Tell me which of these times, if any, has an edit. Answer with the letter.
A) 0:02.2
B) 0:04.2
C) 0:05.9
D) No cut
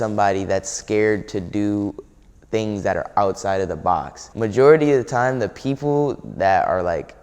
B